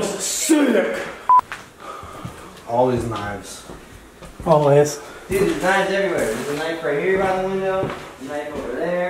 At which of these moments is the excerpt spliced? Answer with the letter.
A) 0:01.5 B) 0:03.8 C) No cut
A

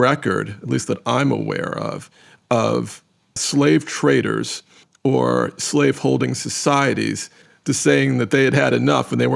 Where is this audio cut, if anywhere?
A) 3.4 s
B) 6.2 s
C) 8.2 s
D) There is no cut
A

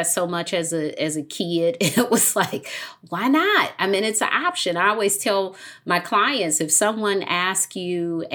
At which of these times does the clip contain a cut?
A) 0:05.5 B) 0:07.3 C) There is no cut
C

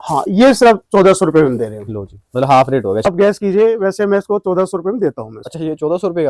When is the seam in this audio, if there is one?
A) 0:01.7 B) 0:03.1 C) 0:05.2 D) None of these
B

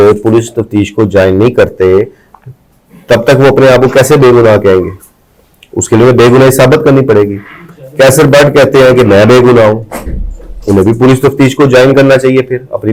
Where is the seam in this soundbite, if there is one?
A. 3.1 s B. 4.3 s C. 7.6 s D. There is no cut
D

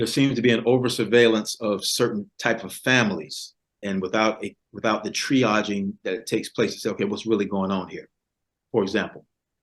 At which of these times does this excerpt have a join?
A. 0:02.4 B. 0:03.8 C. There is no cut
B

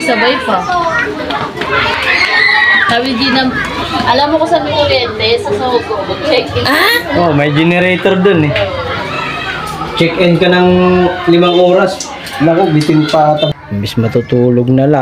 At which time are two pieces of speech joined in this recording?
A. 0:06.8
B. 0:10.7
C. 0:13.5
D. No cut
C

